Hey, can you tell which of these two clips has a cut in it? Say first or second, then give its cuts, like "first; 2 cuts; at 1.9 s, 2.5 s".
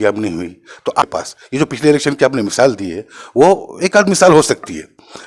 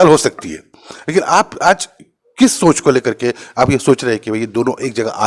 first; 1 cut; at 1.0 s